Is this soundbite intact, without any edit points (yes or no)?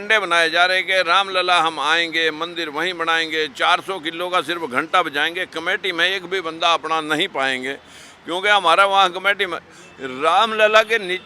yes